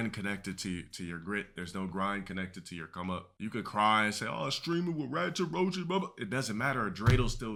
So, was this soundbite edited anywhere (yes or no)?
no